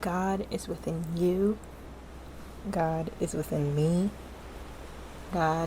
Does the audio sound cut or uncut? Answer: uncut